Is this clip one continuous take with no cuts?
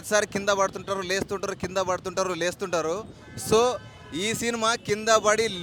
yes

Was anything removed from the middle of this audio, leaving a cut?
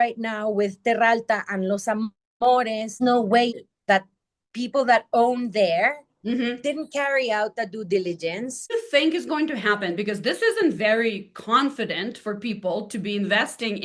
yes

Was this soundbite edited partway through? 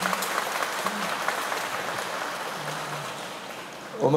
no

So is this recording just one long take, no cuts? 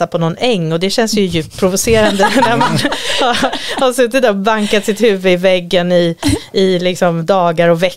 yes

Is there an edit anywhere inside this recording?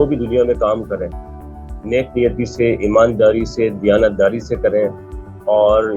no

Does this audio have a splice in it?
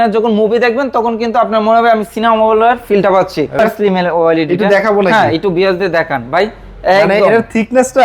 yes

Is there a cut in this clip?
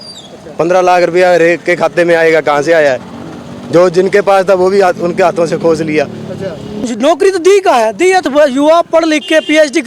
yes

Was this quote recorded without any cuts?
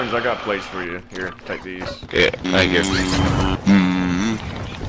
no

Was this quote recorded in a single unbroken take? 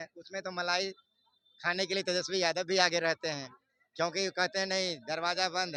yes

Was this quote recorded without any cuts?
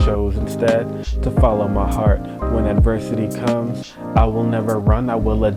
yes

